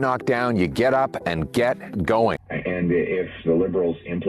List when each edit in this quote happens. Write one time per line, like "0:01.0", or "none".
0:02.5